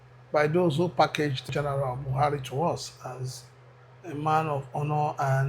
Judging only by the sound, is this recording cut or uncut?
cut